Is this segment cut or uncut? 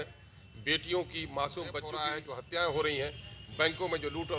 cut